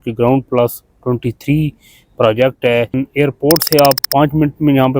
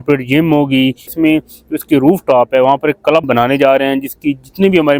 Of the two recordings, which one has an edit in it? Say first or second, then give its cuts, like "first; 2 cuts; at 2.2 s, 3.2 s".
first; 1 cut; at 3.0 s